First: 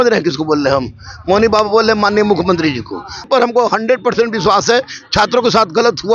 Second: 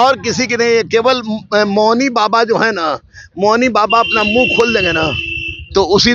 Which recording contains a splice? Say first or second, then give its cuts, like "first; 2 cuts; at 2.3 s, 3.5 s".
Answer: first; 1 cut; at 3.3 s